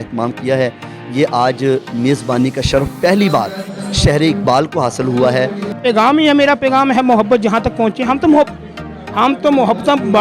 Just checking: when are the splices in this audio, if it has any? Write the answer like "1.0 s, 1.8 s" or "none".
5.8 s